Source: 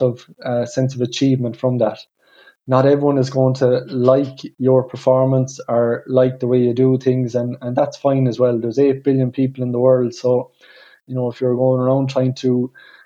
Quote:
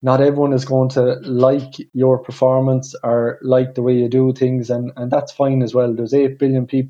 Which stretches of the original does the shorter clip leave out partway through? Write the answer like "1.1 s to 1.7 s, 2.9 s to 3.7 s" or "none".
none